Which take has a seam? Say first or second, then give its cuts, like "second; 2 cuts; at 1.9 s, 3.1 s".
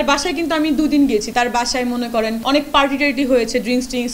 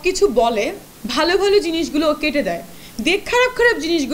first; 2 cuts; at 1.3 s, 2.4 s